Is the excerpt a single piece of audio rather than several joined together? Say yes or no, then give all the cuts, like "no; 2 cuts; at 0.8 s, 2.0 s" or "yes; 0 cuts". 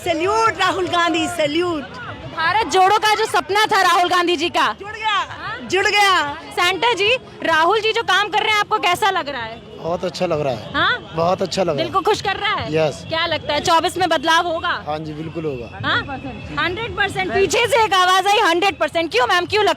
no; 1 cut; at 6.4 s